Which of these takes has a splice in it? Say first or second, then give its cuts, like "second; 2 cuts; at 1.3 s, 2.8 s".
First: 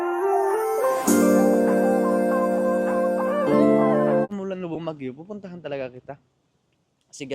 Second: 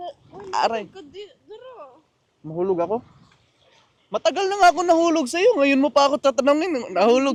first; 1 cut; at 4.3 s